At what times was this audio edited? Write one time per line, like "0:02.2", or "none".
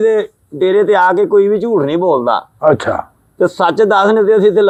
none